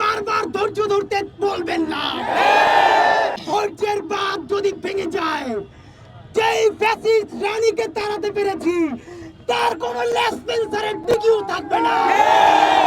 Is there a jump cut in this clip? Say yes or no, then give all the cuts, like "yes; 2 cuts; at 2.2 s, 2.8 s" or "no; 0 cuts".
yes; 1 cut; at 3.4 s